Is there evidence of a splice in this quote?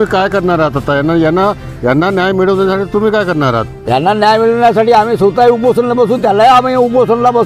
no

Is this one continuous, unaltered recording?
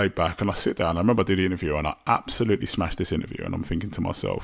yes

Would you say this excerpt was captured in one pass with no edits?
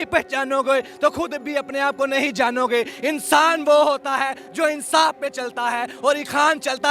yes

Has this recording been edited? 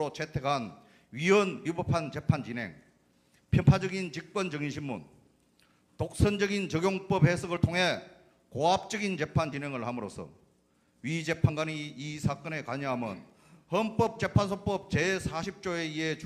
yes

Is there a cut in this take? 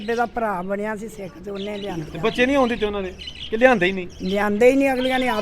yes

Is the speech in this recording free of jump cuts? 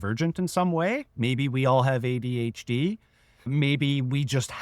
no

